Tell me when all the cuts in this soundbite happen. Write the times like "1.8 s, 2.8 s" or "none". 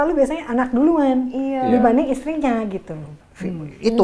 3.1 s

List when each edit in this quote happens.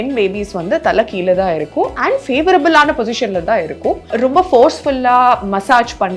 4.1 s

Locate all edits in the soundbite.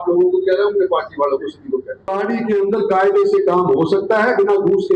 2.1 s

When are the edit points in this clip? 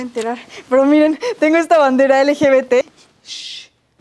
2.8 s

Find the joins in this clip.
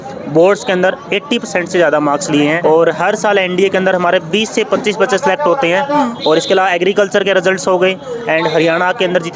2.6 s

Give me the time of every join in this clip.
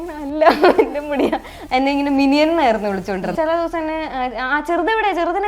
1.5 s, 3.3 s

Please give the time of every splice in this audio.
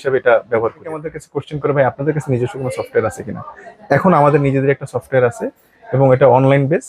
1.1 s

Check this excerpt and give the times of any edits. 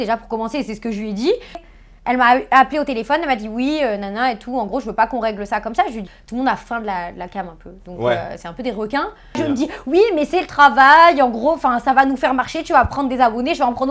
1.6 s, 6.1 s, 9.4 s

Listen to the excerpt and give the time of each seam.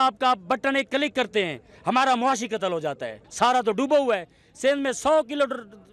3.2 s

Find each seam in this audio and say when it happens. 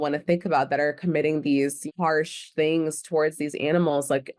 1.8 s

